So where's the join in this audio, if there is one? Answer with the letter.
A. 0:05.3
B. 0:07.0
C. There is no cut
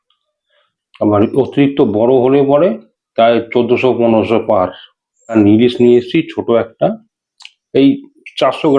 A